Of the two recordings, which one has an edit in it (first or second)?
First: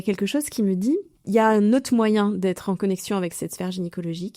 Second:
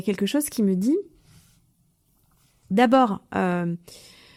first